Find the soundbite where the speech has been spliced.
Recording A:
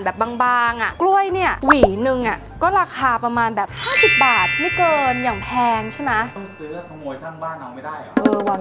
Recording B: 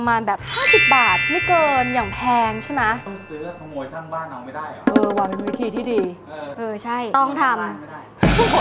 A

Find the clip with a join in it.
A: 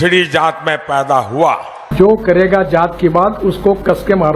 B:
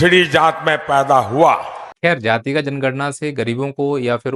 A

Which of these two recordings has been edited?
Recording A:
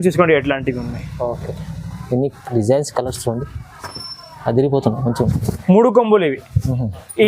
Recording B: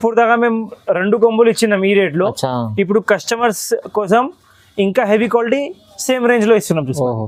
A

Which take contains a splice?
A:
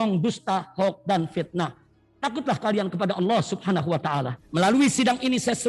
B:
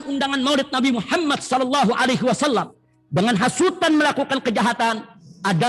A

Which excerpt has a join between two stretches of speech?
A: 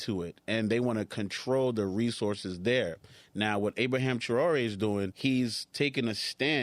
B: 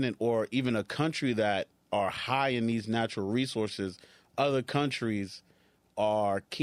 A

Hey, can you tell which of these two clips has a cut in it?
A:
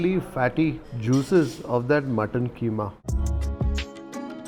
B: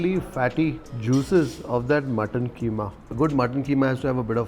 A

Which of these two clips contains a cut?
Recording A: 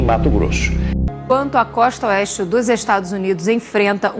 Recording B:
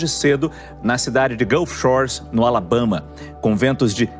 A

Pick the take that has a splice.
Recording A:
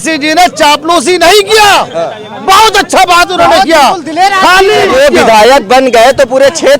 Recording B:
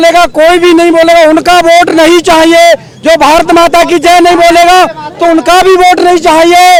A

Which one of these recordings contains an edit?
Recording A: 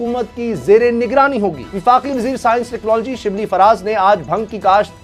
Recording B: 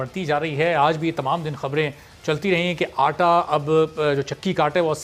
A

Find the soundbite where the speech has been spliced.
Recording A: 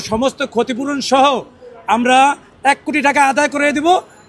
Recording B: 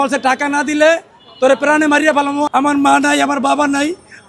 B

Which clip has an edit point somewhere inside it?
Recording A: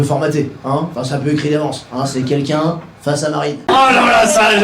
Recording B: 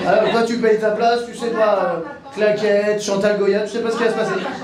A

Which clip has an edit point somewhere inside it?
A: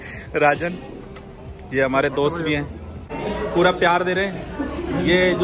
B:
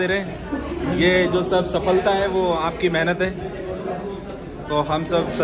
A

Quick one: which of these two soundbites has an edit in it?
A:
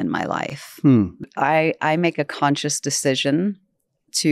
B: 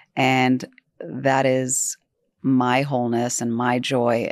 A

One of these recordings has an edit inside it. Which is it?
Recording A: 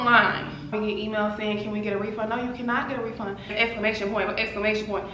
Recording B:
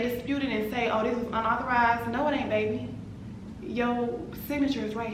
A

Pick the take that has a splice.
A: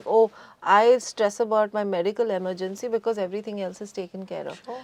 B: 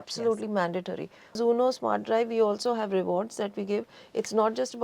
B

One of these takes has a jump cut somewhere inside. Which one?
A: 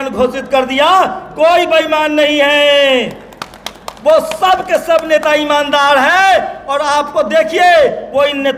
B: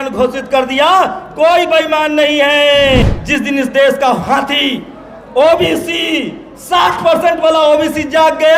B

